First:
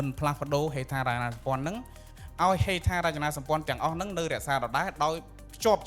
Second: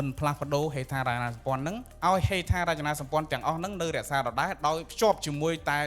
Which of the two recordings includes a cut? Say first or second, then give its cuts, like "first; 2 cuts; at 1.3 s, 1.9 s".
second; 2 cuts; at 1.9 s, 4.9 s